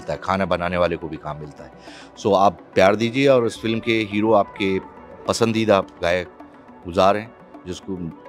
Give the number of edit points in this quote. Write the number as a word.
zero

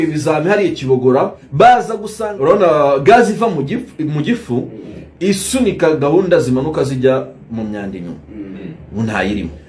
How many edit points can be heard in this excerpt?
two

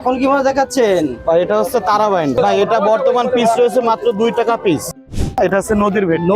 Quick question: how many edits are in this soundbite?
two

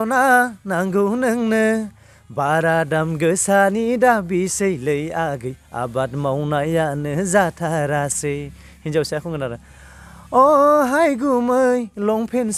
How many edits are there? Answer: zero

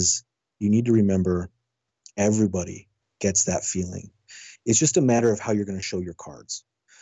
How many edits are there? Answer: one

